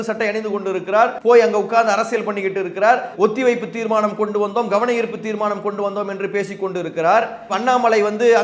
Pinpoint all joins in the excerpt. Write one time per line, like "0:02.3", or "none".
0:01.2